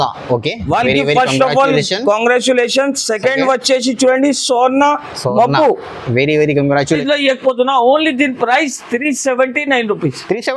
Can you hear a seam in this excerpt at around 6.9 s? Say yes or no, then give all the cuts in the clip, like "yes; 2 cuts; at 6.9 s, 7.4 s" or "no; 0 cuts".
yes; 1 cut; at 6.9 s